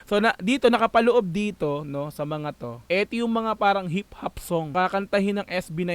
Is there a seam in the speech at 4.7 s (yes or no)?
yes